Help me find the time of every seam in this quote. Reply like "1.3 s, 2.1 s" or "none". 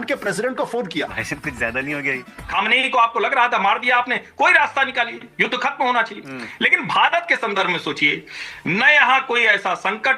2.3 s